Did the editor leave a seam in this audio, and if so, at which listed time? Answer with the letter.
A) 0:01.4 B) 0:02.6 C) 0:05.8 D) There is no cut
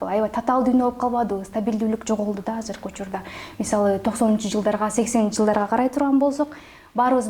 D